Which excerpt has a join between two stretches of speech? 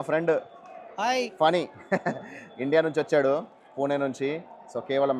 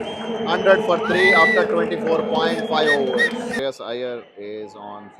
second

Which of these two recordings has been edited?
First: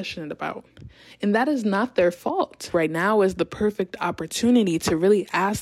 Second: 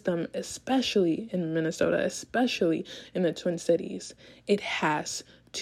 first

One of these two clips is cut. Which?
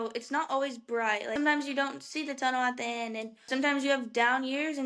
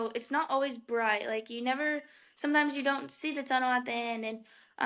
first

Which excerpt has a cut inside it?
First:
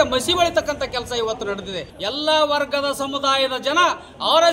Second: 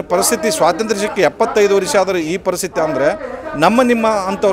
first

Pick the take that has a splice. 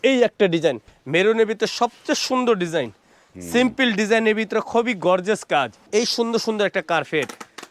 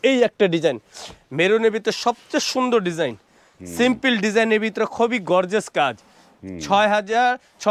first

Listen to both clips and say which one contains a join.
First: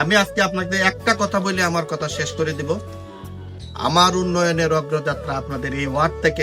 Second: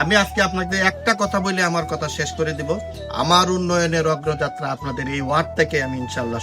second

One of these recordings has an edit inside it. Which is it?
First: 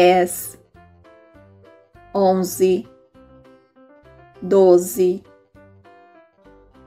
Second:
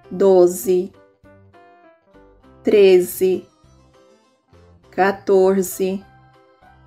second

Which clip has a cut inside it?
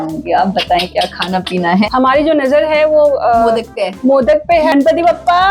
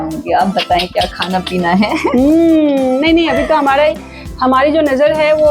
first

